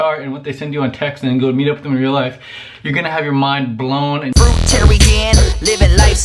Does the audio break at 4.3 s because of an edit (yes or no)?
yes